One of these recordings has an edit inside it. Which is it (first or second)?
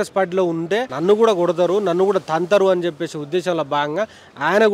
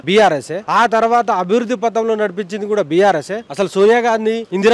second